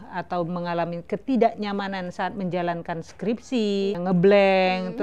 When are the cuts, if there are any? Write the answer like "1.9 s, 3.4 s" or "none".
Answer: 4.0 s